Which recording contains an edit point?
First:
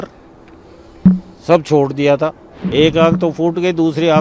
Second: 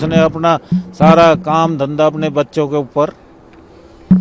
first; 1 cut; at 2.6 s

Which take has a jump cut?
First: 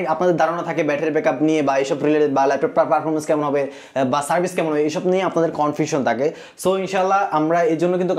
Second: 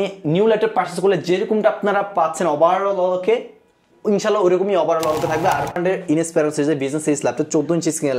second; 1 cut; at 5.8 s

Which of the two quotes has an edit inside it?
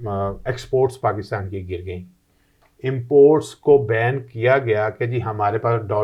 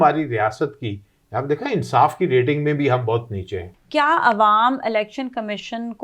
second; 1 cut; at 3.7 s

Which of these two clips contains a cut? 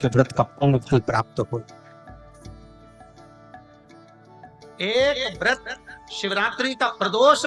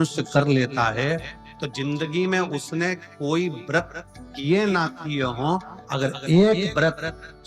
first; 2 cuts; at 1.6 s, 4.3 s

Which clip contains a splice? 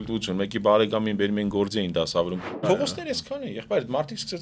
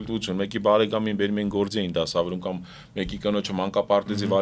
first; 1 cut; at 2.6 s

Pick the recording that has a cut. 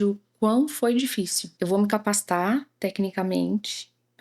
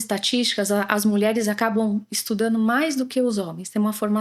first; 1 cut; at 1.4 s

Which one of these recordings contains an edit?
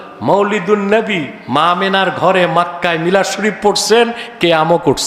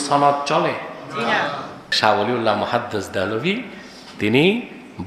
second; 1 cut; at 1.8 s

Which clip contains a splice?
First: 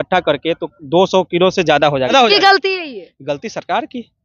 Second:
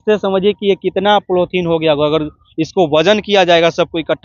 first; 1 cut; at 2.1 s

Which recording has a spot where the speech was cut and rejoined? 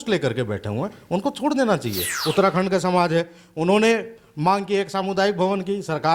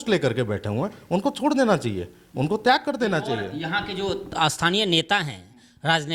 first; 1 cut; at 2.1 s

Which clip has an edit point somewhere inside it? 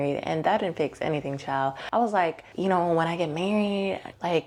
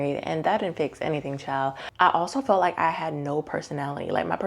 second; 1 cut; at 1.9 s

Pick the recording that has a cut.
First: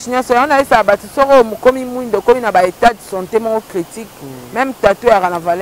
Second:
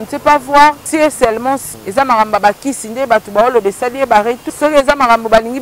second; 2 cuts; at 1.3 s, 4.5 s

